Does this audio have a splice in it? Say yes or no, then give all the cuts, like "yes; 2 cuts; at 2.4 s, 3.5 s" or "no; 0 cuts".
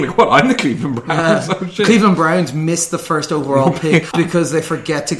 yes; 1 cut; at 4.1 s